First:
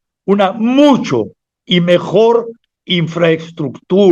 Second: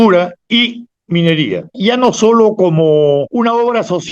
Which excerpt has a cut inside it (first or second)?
second